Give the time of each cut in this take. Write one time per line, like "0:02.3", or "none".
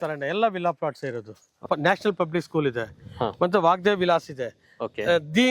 0:01.6